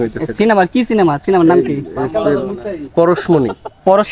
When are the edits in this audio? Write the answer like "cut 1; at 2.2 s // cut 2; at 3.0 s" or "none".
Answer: none